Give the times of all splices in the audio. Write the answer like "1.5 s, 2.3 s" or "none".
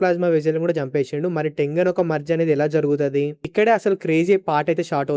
none

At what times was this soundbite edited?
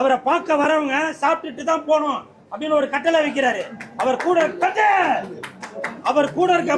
none

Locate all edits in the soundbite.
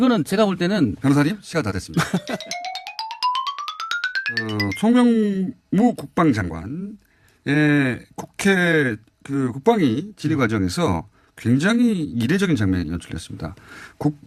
2.1 s

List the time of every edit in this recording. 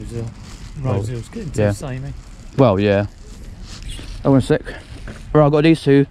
none

